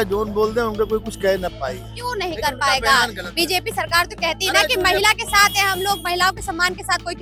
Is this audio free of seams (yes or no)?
yes